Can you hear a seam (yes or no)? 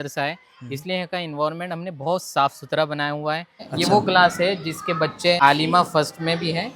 yes